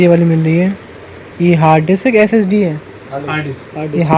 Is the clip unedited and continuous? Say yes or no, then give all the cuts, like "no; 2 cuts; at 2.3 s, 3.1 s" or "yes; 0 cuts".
yes; 0 cuts